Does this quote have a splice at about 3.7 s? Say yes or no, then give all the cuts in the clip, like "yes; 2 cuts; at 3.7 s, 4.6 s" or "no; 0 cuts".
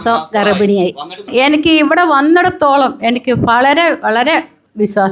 no; 1 cut; at 1.2 s